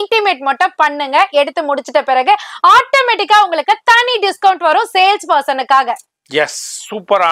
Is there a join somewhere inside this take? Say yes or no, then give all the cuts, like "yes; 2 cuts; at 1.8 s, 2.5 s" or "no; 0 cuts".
no; 0 cuts